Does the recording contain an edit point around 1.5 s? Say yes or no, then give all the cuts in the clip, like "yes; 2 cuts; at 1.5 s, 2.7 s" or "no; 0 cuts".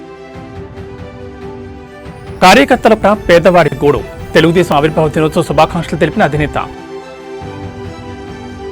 yes; 1 cut; at 1.5 s